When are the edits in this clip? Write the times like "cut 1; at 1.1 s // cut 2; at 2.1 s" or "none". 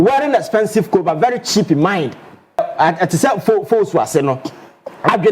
cut 1; at 2.7 s